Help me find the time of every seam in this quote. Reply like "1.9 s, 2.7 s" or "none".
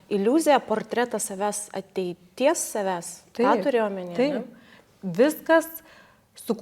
4.7 s